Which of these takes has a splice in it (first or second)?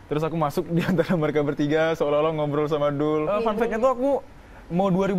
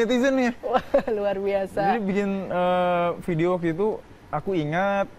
first